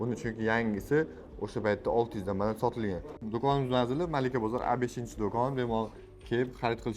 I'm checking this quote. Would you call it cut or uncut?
cut